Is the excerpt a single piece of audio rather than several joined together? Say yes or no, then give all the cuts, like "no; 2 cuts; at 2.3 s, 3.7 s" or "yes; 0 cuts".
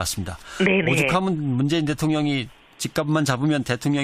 yes; 0 cuts